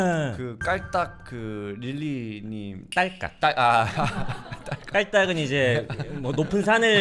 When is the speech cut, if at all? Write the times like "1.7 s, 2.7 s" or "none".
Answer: none